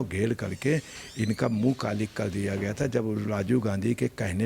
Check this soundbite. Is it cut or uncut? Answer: uncut